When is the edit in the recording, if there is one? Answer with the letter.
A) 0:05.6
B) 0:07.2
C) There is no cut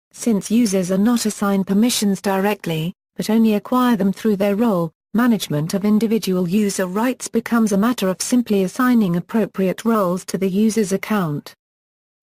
A